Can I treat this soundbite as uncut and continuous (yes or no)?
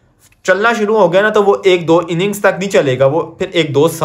yes